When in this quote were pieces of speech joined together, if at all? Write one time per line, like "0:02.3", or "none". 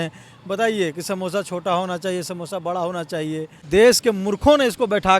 0:03.5